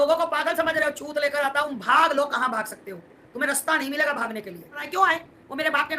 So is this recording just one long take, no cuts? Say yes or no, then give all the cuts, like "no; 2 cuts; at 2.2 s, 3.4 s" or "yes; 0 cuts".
no; 2 cuts; at 1.7 s, 4.8 s